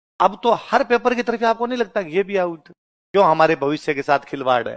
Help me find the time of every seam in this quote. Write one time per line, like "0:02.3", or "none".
0:02.9
0:03.8